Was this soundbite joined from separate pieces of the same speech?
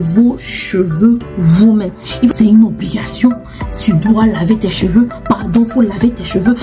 yes; 1 cut; at 2.3 s

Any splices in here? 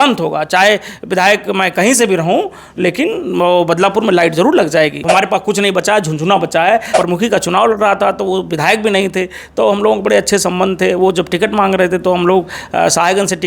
yes; 2 cuts; at 5.0 s, 6.9 s

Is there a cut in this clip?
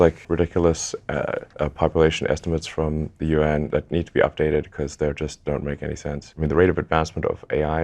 yes; 1 cut; at 6.3 s

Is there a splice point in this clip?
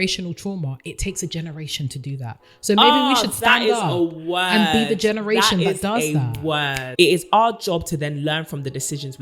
yes; 1 cut; at 6.9 s

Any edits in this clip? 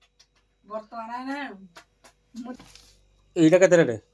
yes; 1 cut; at 2.6 s

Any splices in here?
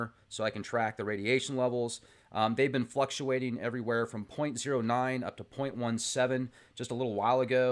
yes; 1 cut; at 1.0 s

